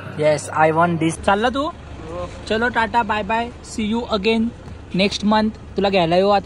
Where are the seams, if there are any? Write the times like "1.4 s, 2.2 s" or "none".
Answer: 1.2 s